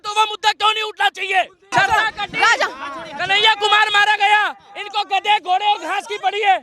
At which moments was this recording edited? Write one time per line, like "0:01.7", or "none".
0:01.7

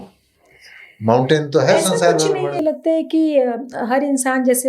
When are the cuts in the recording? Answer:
0:02.6

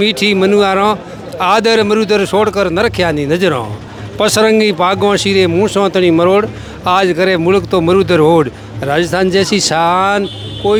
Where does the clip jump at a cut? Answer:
none

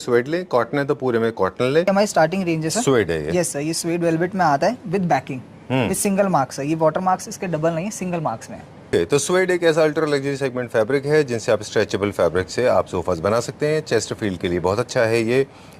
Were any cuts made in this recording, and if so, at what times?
0:01.9
0:08.9

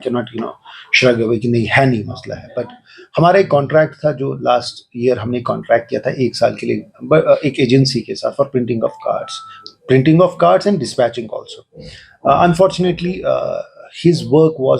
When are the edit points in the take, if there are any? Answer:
none

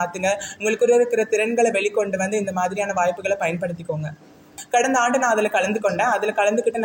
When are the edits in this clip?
0:04.6

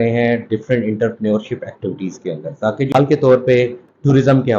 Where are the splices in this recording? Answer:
0:02.9

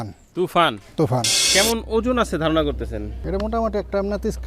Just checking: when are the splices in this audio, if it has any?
0:01.4

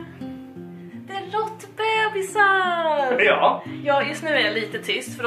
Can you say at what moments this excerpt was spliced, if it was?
none

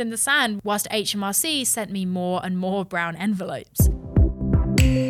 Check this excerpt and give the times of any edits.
0:03.7

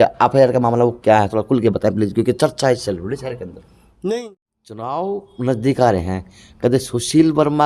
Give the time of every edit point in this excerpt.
0:04.9

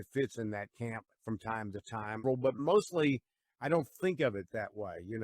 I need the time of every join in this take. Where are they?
0:02.2

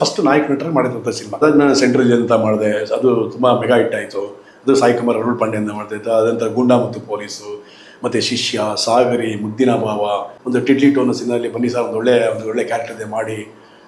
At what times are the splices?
0:01.4
0:10.3

